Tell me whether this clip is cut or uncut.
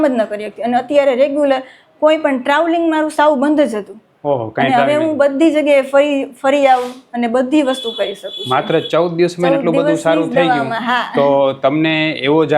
uncut